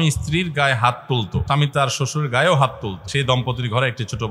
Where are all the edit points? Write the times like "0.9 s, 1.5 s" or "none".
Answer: 1.4 s, 3.0 s

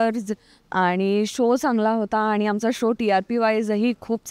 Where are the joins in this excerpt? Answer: none

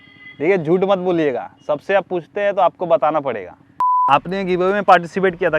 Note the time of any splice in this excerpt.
4.0 s

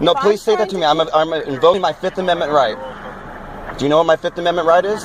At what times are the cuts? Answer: 1.8 s

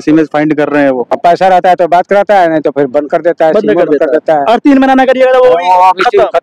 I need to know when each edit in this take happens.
1.1 s

